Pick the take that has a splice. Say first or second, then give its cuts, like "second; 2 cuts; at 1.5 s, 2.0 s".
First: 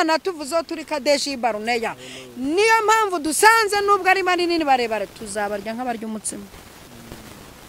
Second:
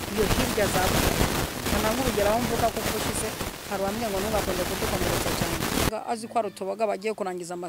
second; 1 cut; at 5.9 s